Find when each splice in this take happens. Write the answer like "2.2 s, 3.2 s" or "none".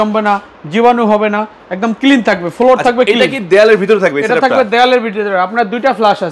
none